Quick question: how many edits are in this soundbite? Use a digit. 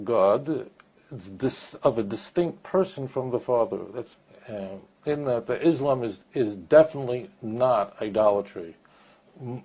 1